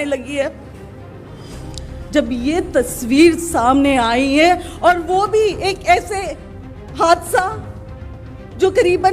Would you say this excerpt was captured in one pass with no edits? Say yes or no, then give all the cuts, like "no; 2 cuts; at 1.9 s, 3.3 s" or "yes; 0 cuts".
yes; 0 cuts